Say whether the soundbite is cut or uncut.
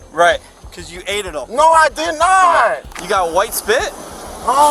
cut